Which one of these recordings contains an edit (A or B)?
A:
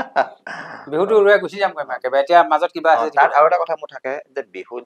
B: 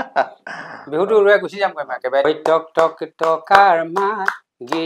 B